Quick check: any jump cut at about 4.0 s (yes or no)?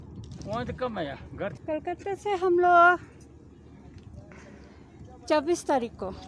no